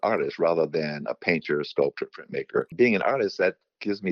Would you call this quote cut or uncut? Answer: cut